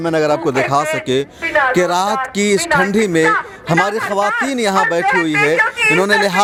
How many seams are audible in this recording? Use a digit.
0